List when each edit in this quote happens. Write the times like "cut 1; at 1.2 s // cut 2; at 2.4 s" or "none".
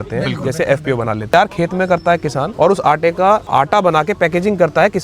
cut 1; at 1.3 s // cut 2; at 2.5 s // cut 3; at 3.5 s

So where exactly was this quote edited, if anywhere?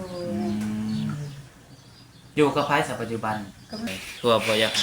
cut 1; at 3.9 s

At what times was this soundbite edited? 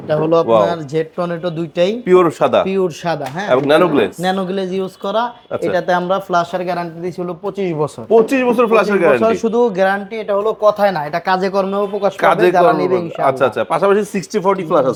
none

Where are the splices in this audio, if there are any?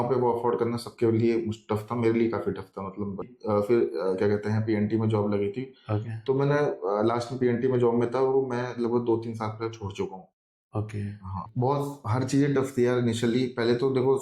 cut 1; at 3.3 s // cut 2; at 11.4 s

